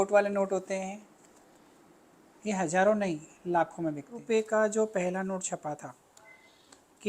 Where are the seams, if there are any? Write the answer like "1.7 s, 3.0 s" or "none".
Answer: 4.2 s